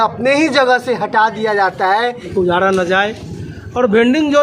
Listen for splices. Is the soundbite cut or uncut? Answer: cut